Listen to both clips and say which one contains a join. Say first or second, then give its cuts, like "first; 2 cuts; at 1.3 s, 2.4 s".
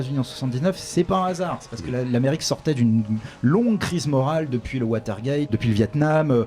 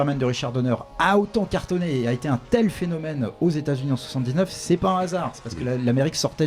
first; 1 cut; at 5.5 s